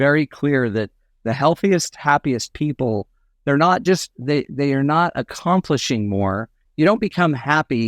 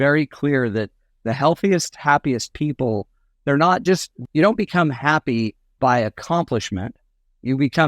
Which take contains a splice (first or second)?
second